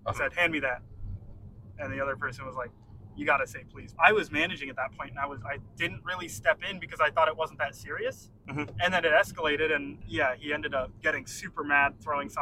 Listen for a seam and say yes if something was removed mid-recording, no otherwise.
yes